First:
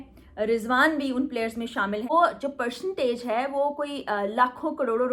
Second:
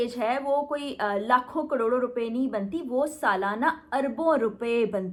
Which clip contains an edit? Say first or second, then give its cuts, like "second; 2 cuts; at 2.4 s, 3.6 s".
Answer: first; 1 cut; at 2.1 s